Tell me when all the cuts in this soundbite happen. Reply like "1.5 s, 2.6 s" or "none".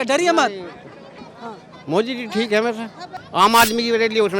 3.2 s